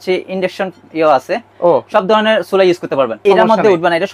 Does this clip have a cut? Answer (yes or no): yes